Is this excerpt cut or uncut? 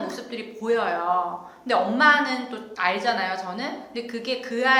uncut